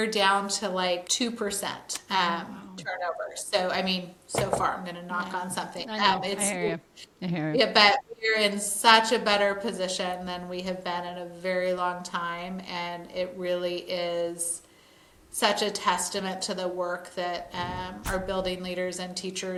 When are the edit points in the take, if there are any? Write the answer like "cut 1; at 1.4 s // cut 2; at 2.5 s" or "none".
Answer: none